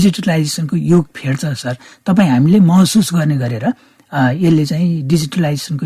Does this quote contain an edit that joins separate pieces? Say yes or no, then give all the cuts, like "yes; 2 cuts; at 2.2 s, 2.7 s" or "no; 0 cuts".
no; 0 cuts